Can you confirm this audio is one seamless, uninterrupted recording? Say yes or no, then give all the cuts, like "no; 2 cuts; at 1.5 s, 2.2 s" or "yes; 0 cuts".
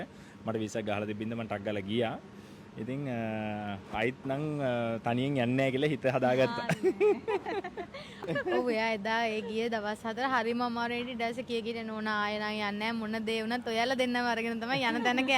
no; 1 cut; at 8.1 s